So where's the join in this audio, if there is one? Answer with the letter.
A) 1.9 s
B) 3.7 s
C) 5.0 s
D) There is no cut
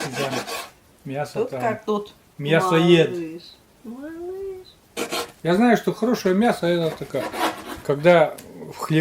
C